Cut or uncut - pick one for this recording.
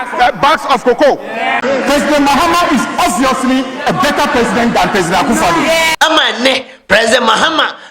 cut